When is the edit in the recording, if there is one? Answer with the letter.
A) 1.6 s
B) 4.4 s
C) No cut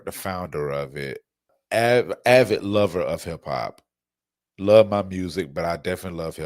A